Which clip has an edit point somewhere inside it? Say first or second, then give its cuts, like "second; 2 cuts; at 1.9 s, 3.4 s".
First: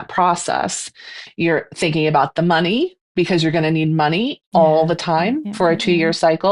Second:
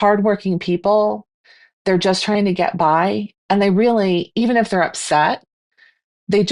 first; 2 cuts; at 1.2 s, 3.0 s